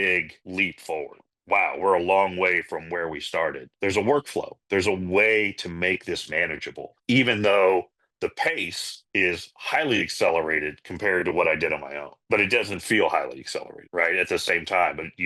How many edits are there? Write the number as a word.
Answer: two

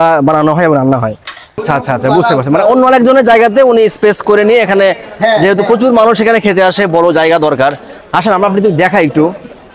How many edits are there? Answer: one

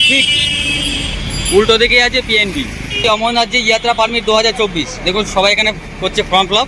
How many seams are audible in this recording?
one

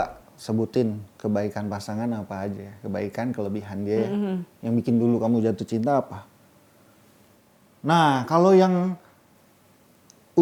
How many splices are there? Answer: zero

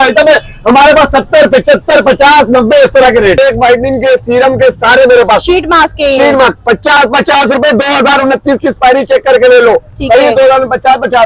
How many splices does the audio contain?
one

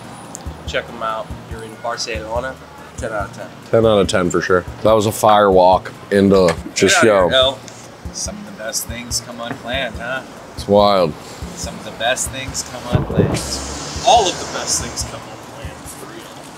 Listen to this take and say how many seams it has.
zero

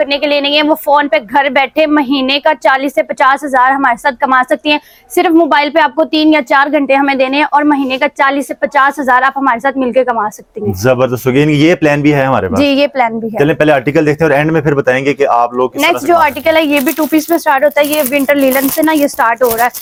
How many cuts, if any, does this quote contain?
zero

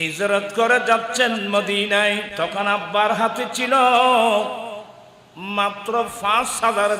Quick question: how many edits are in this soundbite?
one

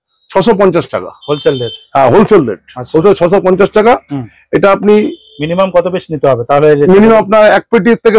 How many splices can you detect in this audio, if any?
zero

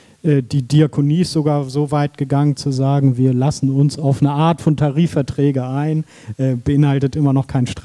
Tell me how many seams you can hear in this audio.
zero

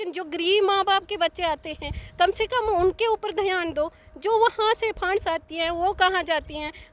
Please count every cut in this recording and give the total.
zero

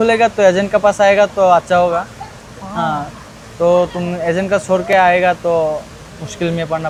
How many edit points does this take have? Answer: zero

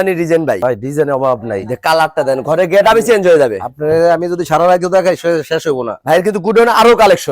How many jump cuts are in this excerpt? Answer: zero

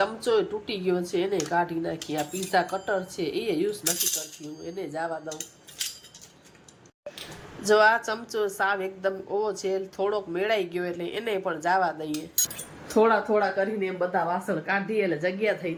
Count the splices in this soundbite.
zero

